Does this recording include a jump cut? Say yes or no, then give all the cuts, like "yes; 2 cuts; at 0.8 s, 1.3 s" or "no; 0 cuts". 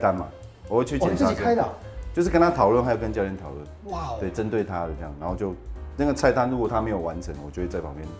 no; 0 cuts